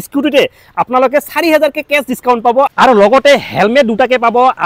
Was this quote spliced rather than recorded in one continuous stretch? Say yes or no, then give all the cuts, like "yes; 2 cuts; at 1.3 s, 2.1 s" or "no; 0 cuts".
yes; 1 cut; at 2.7 s